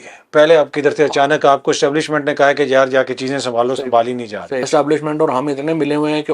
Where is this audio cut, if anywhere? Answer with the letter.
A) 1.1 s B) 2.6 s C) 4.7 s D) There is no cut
C